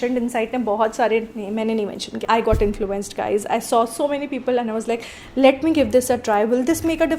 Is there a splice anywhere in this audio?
yes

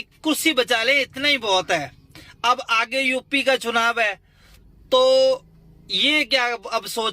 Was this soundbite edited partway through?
no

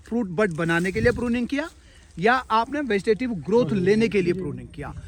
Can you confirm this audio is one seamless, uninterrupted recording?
yes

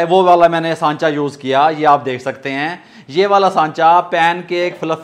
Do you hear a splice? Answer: no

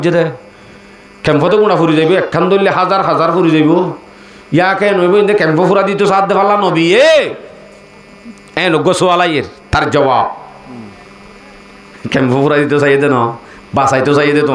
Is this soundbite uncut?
yes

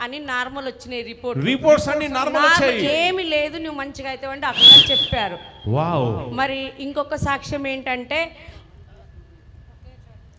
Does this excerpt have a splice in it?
no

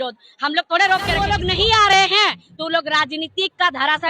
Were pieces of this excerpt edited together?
yes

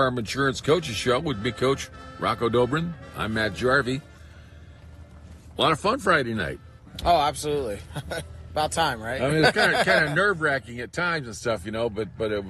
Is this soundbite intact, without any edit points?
no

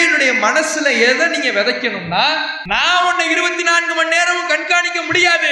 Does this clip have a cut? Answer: yes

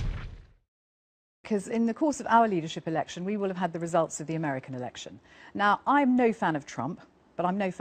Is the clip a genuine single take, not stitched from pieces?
yes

